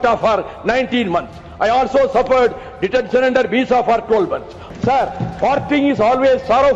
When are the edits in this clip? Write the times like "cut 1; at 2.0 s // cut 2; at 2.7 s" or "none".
cut 1; at 4.6 s